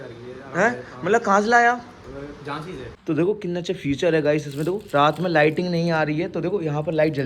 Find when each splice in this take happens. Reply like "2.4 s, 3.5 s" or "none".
2.9 s